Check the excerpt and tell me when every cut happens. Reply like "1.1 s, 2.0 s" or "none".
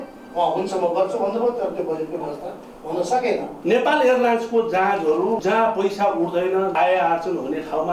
3.5 s, 5.4 s, 6.7 s